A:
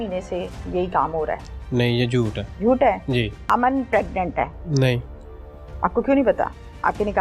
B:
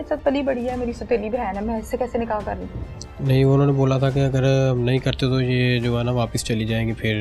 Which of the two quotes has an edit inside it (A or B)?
A